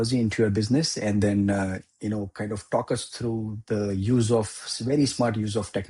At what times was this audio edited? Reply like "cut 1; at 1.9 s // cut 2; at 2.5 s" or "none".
none